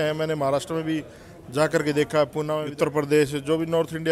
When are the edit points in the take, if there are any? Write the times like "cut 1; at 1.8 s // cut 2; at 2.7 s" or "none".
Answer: cut 1; at 2.6 s